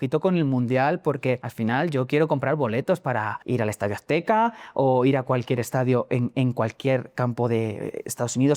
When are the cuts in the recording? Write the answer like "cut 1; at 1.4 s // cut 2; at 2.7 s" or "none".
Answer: cut 1; at 1.5 s // cut 2; at 3.4 s

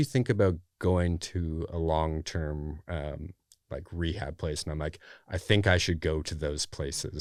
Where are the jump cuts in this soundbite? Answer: none

